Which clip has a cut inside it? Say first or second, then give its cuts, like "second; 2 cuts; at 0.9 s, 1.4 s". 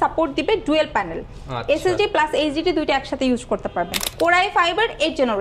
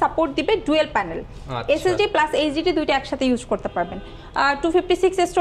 first; 1 cut; at 4.0 s